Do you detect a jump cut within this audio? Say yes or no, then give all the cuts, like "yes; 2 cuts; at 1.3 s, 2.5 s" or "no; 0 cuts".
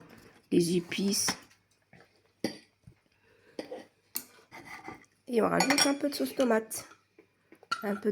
yes; 1 cut; at 4.5 s